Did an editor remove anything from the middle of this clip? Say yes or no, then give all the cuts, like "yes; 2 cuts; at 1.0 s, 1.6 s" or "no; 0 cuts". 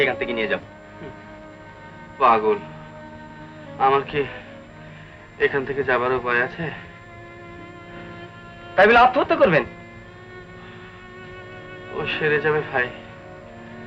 no; 0 cuts